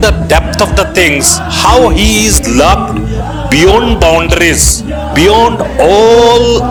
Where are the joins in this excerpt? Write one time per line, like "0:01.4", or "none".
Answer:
none